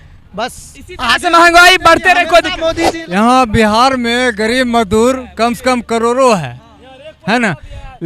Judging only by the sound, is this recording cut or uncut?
cut